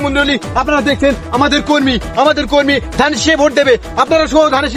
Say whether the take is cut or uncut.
uncut